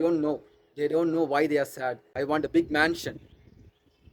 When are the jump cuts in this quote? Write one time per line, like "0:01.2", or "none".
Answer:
0:02.2